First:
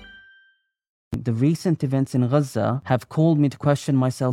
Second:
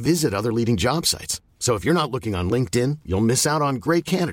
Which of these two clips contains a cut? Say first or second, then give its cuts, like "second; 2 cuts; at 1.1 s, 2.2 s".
first; 2 cuts; at 1.2 s, 2.8 s